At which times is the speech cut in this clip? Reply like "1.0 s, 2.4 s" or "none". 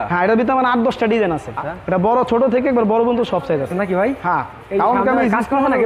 1.5 s, 3.7 s